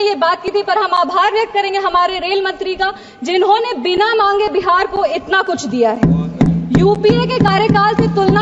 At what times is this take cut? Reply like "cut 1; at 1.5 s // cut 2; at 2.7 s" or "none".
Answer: none